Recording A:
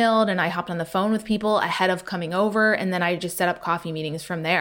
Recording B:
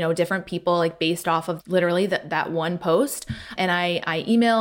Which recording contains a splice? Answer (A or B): B